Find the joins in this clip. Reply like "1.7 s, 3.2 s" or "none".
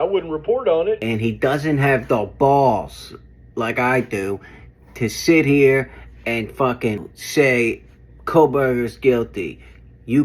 1.0 s, 7.1 s